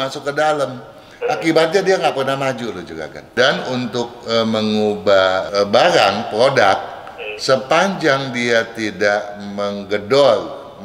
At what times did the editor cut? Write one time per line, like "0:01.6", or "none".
0:03.3
0:05.5

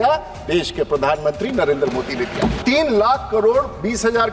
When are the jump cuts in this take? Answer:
0:02.6

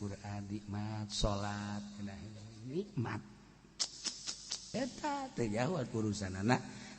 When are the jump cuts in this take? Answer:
0:04.6

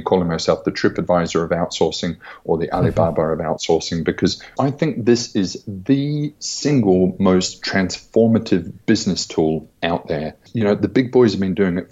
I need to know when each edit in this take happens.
0:04.5
0:10.5

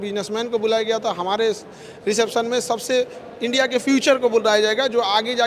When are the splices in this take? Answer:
none

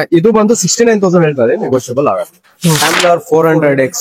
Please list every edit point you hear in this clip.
0:02.9

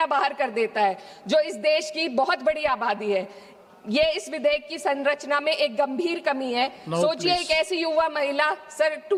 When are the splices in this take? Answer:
none

